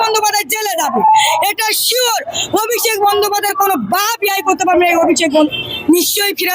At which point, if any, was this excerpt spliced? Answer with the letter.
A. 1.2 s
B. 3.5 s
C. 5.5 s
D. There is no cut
C